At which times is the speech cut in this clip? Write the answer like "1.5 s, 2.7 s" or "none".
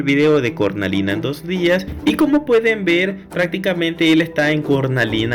1.9 s